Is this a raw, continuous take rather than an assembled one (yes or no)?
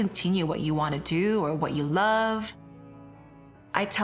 no